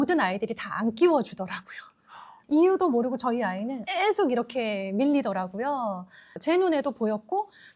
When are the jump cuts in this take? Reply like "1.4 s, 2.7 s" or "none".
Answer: 2.2 s, 6.3 s